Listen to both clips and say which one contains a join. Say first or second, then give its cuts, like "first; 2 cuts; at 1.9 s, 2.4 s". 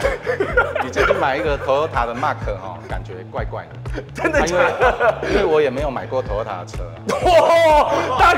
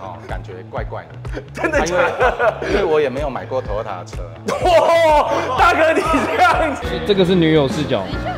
second; 1 cut; at 6.8 s